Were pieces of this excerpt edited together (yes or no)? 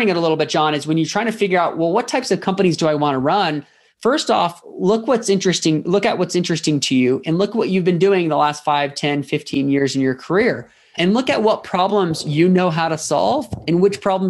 no